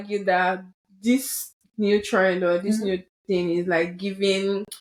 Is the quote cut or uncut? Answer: uncut